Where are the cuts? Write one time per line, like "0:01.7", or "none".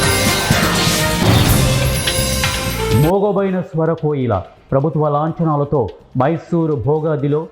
0:02.9